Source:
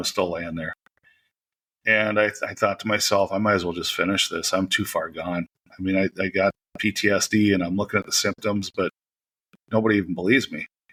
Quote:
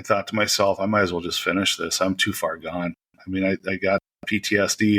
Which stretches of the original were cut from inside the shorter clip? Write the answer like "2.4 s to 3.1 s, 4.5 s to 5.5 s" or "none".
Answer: none